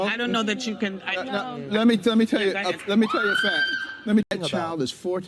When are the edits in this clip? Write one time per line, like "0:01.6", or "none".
0:04.3